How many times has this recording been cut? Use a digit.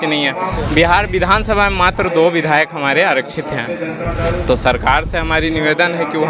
0